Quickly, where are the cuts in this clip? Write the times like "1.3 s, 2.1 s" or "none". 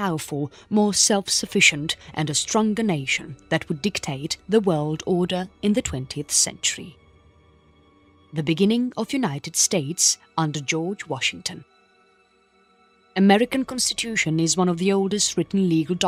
none